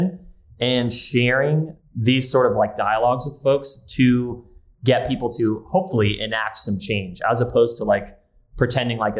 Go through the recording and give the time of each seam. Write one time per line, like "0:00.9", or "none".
0:01.7

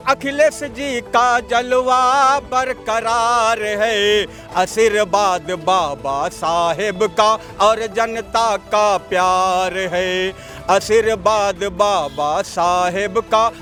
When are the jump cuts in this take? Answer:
none

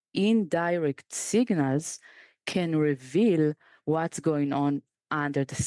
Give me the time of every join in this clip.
none

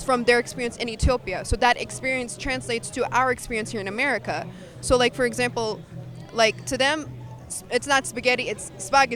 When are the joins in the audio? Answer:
none

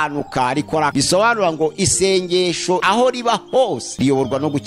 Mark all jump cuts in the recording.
0:01.2
0:02.8
0:03.9

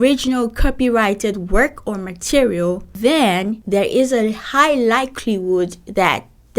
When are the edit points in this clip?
0:02.9
0:03.6

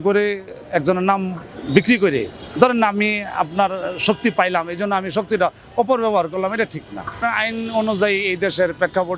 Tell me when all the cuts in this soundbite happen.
none

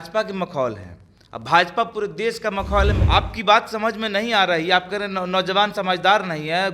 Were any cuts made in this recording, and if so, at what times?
0:03.0

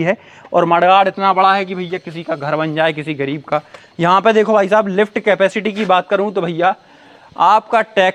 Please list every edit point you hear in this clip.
none

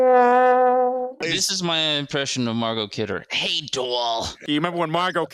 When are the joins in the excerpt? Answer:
0:01.2
0:04.3

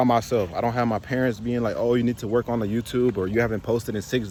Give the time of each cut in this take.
none

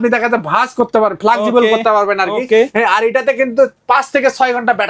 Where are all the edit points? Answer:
none

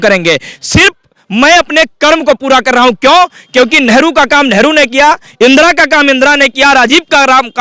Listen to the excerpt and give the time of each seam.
none

